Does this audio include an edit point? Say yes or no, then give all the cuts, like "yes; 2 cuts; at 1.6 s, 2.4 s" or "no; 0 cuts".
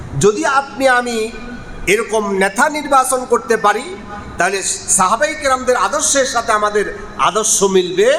no; 0 cuts